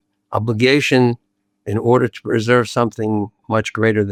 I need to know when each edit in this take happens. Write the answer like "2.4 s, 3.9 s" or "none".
none